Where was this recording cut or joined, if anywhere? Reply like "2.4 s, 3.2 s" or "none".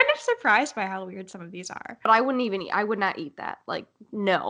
2.1 s